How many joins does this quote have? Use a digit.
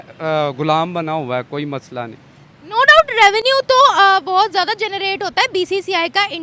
0